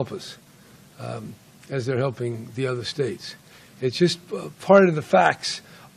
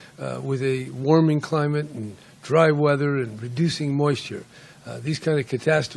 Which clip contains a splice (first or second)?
second